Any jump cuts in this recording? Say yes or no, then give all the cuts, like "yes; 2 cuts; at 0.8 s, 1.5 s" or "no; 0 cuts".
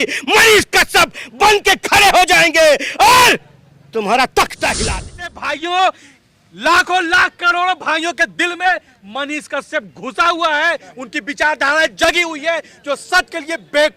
yes; 1 cut; at 5.3 s